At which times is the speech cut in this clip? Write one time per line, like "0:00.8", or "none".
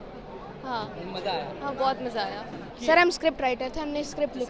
0:02.6